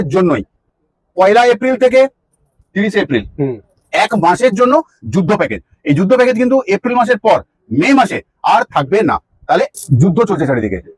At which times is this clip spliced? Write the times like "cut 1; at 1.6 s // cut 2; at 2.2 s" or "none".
cut 1; at 9.8 s